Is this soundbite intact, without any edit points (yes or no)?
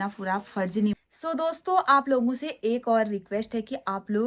no